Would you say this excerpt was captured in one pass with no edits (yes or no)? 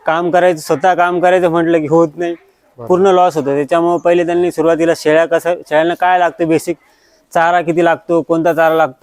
yes